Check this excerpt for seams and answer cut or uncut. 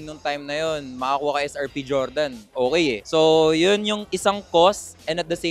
uncut